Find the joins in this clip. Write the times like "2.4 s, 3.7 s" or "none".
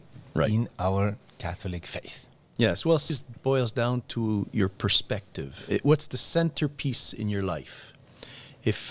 3.1 s, 5.7 s